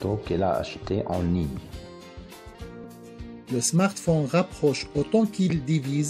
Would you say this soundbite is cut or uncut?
uncut